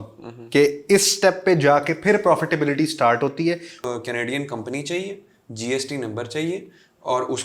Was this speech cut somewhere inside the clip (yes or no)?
yes